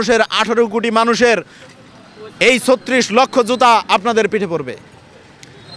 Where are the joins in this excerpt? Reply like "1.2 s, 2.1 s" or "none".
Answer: none